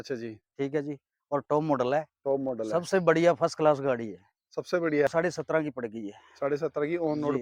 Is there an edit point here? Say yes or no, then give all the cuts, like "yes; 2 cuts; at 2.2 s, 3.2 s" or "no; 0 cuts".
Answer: yes; 1 cut; at 5.1 s